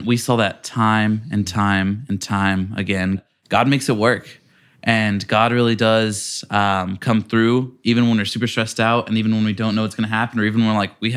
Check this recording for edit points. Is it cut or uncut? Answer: cut